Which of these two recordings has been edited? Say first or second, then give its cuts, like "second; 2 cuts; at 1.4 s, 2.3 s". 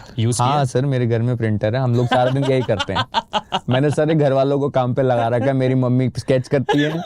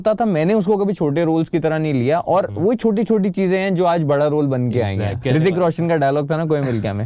second; 1 cut; at 5.2 s